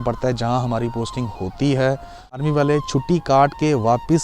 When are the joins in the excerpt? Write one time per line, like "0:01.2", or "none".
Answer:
0:02.4